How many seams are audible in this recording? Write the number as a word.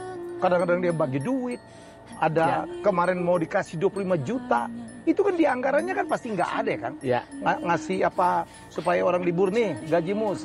zero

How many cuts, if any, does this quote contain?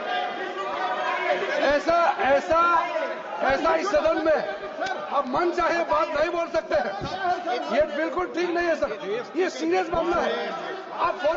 zero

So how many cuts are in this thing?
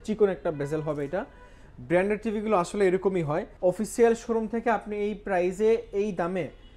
one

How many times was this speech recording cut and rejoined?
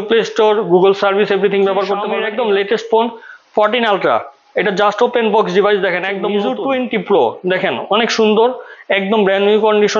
two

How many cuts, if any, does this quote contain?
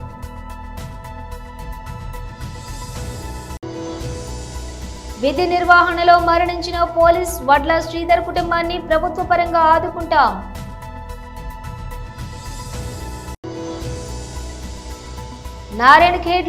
zero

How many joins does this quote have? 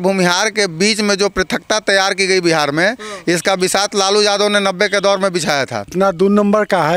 one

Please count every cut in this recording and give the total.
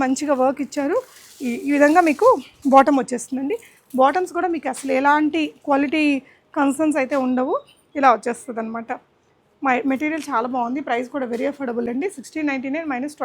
zero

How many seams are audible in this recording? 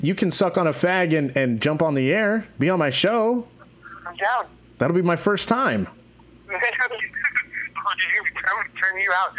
zero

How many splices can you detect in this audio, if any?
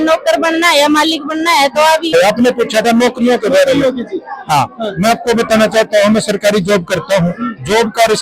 one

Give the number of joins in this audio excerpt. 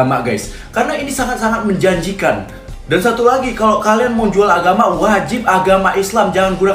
zero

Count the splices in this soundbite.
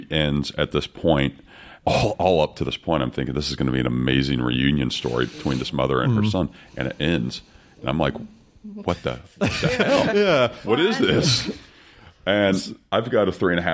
zero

